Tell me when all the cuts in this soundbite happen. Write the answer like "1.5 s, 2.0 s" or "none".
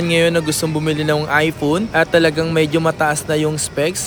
none